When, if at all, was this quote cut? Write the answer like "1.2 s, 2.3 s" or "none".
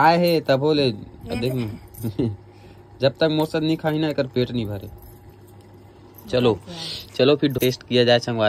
7.6 s